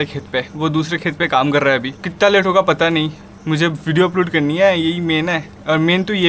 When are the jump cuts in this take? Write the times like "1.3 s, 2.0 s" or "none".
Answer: 2.0 s